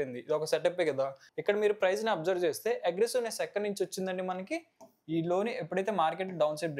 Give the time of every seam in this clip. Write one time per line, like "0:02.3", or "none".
0:01.2